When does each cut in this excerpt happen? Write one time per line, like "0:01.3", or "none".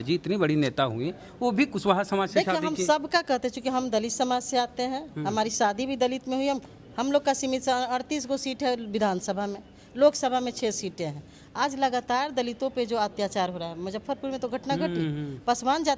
none